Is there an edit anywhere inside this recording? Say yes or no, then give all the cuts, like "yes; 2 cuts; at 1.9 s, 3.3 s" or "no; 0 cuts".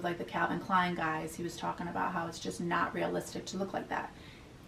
no; 0 cuts